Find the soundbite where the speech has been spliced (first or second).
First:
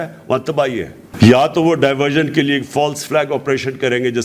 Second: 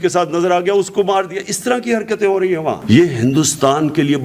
first